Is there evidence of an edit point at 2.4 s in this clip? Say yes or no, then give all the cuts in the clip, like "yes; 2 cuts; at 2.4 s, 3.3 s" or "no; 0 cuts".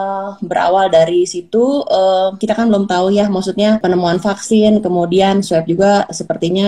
yes; 2 cuts; at 2.4 s, 3.8 s